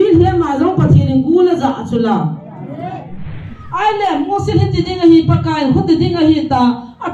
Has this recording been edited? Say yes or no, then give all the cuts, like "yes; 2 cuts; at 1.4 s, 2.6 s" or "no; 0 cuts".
yes; 1 cut; at 3.2 s